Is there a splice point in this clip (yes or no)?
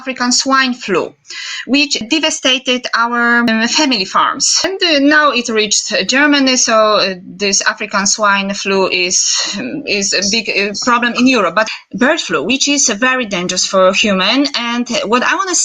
yes